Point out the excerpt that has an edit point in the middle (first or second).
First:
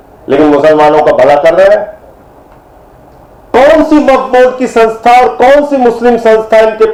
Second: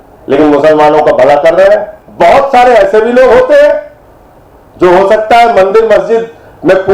second